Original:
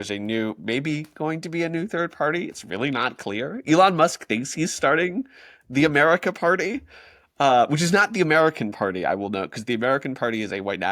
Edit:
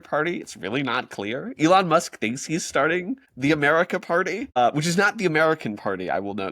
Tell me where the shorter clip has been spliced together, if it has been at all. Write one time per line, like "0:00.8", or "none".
0:03.3
0:04.6